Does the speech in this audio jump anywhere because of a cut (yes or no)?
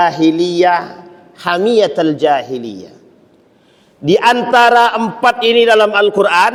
no